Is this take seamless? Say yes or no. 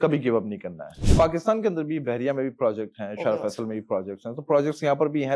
no